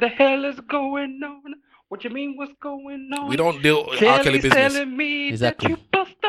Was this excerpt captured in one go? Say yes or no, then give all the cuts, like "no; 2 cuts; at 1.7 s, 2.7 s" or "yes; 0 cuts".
yes; 0 cuts